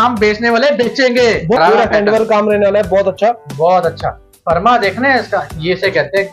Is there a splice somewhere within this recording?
yes; 1 cut; at 1.6 s

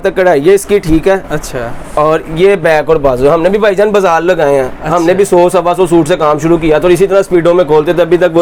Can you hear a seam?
no; 0 cuts

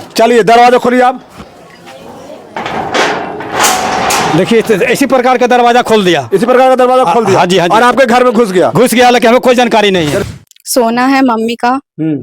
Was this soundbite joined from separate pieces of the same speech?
yes; 1 cut; at 10.2 s

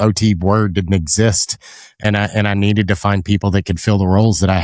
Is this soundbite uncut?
yes; 0 cuts

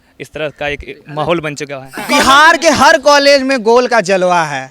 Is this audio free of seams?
no; 1 cut; at 2.0 s

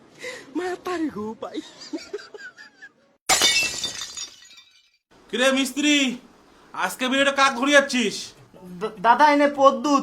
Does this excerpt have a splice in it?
yes; 1 cut; at 1.8 s

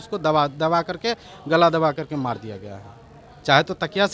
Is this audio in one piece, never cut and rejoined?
yes; 0 cuts

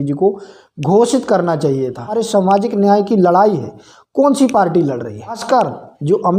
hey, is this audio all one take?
no; 2 cuts; at 2.1 s, 5.4 s

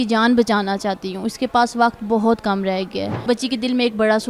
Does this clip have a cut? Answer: yes; 1 cut; at 3.2 s

